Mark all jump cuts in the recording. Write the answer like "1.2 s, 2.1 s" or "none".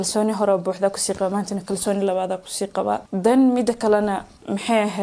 3.1 s